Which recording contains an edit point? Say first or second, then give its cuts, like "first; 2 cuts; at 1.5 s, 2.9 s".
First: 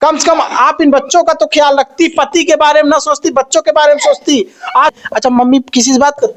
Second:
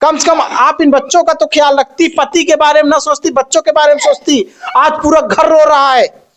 first; 1 cut; at 5.0 s